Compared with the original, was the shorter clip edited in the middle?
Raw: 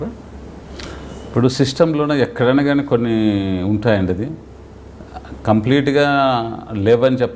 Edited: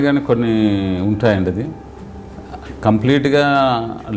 no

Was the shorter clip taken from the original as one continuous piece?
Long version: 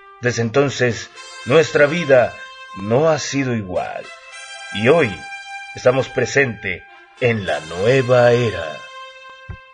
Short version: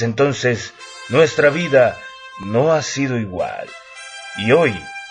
yes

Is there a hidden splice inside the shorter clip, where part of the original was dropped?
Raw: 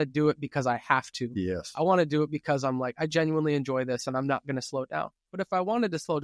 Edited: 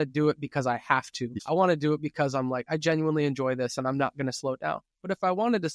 yes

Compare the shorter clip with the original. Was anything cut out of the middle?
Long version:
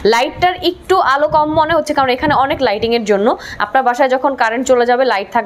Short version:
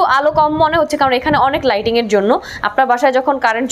no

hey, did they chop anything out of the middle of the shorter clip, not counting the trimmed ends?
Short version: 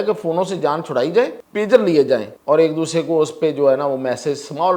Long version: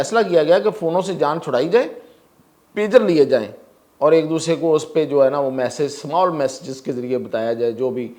yes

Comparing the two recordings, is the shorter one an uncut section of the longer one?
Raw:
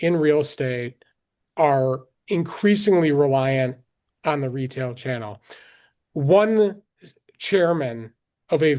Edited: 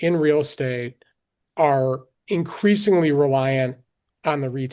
yes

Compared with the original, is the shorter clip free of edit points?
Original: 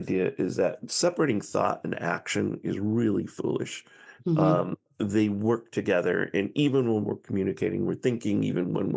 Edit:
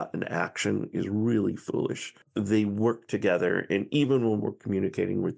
no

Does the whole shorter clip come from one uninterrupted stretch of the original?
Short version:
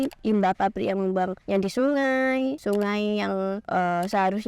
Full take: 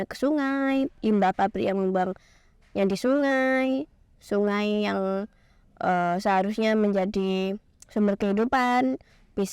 no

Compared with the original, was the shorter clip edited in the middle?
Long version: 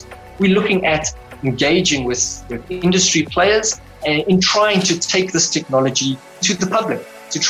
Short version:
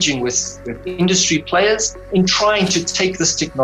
yes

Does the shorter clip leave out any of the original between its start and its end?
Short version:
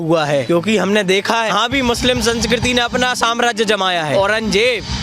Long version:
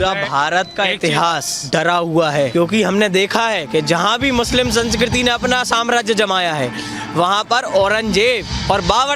yes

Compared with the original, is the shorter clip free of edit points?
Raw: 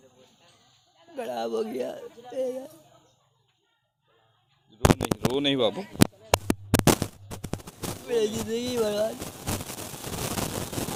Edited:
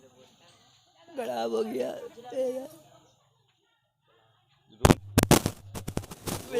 no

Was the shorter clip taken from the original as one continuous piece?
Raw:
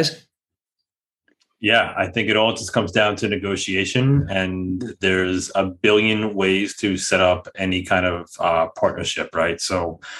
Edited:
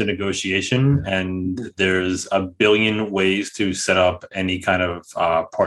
yes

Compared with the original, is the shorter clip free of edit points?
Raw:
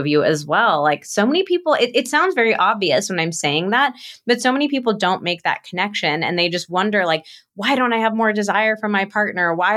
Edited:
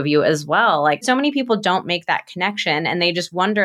no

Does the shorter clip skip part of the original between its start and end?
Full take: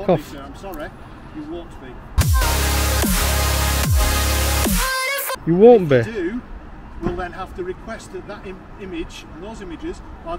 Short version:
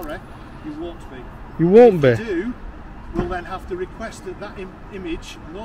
yes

